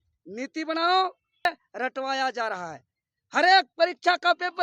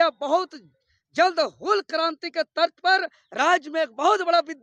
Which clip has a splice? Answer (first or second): first